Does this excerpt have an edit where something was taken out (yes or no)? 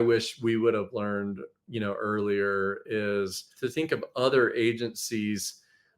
yes